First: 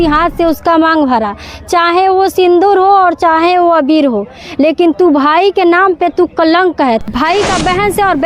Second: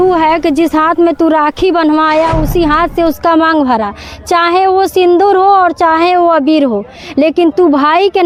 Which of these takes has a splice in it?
first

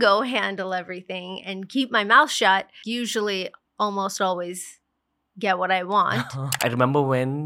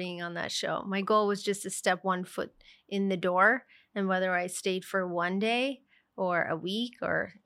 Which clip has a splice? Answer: first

